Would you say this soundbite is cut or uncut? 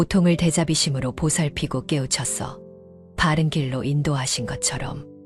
uncut